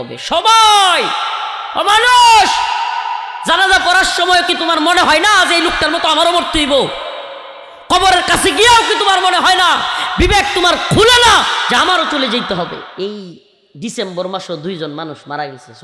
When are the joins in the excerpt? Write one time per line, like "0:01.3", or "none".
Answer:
0:12.9